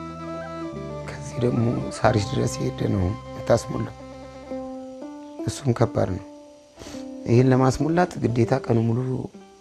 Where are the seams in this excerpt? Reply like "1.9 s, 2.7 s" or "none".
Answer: none